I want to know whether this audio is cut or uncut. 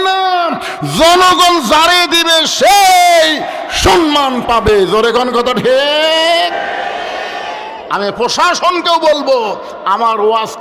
uncut